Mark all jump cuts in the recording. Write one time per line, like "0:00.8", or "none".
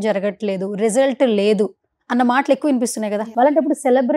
0:03.3

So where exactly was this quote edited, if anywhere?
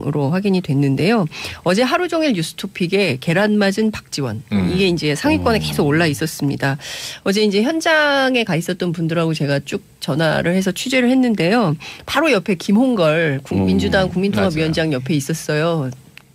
none

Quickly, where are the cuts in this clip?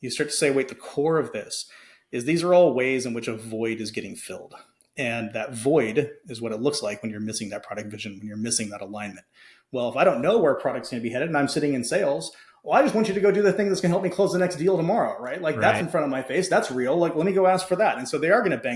none

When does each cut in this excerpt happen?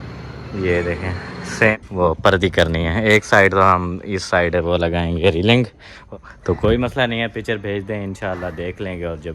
0:01.7
0:06.1

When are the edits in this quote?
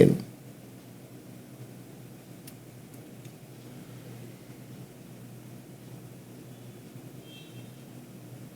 none

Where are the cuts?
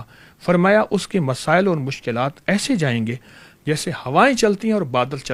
none

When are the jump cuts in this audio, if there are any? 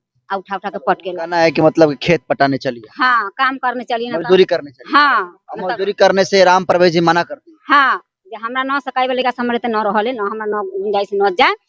0:01.2

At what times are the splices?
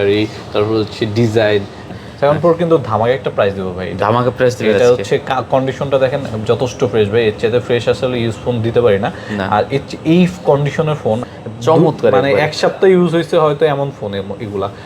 0:01.8
0:11.2

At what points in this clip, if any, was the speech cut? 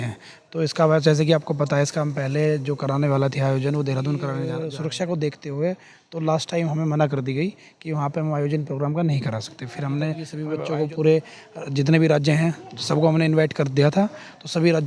0:04.7
0:10.4

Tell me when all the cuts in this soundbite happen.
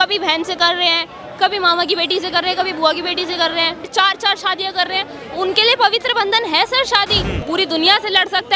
0:03.8
0:07.3

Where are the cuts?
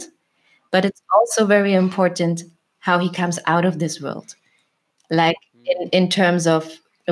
none

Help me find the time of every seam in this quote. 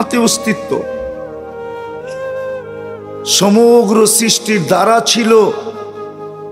0:00.8
0:03.3

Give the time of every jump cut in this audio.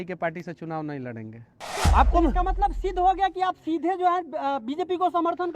0:01.8

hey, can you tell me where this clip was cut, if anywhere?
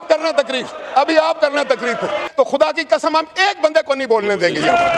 0:02.3

